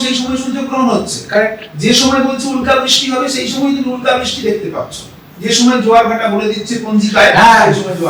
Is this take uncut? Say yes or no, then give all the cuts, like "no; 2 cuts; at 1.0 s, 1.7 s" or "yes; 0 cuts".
yes; 0 cuts